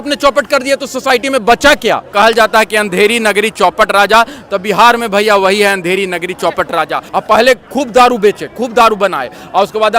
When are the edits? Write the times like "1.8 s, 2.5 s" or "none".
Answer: 2.1 s, 7.0 s